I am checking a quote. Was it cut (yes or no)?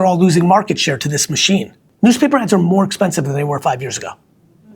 yes